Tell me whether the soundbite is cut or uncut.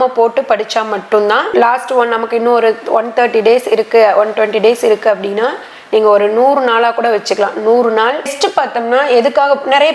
cut